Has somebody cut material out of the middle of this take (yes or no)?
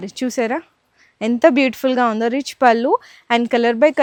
no